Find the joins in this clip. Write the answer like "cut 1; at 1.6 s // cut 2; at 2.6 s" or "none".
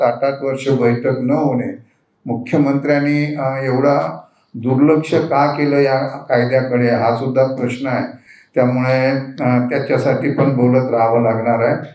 none